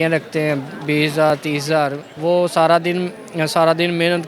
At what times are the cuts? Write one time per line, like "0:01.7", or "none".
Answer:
0:02.1